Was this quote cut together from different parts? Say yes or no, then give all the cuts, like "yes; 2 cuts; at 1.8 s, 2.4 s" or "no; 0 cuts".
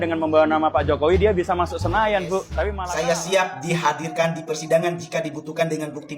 yes; 1 cut; at 2.8 s